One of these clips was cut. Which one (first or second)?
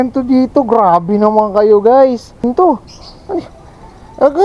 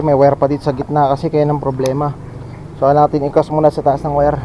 first